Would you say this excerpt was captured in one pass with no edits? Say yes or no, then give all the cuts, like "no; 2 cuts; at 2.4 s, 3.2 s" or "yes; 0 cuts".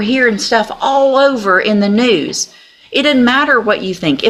yes; 0 cuts